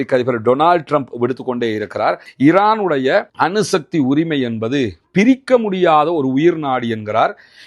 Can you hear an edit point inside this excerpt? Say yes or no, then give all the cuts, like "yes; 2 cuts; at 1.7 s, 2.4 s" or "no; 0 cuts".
yes; 1 cut; at 2.3 s